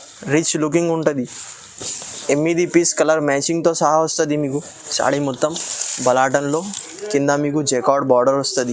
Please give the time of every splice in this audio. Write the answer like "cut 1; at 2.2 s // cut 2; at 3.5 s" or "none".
cut 1; at 4.8 s